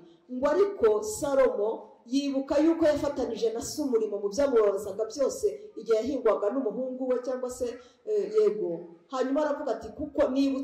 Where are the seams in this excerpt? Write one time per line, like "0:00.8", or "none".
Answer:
none